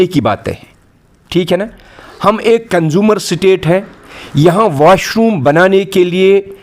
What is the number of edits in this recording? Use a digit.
0